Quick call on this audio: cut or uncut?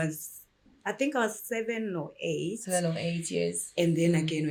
uncut